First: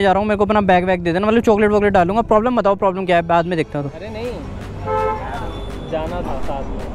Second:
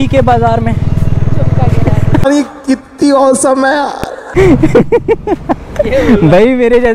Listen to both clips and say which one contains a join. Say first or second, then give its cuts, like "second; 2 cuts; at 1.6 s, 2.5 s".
second; 2 cuts; at 2.2 s, 4.2 s